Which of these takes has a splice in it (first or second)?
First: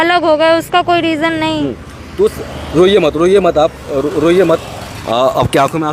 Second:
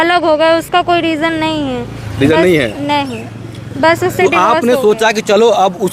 first